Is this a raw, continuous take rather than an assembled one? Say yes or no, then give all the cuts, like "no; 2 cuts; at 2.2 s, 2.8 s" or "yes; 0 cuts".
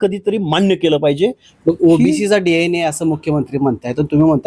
no; 1 cut; at 1.5 s